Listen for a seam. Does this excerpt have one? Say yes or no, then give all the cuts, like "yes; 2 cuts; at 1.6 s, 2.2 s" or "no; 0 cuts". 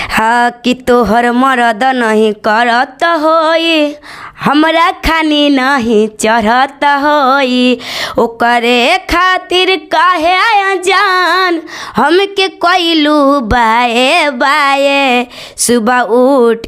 no; 0 cuts